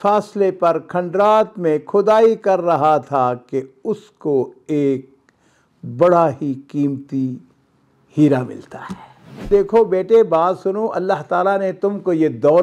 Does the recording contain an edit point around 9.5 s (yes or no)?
yes